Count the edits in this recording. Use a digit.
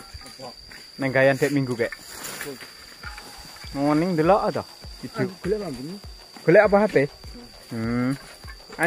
1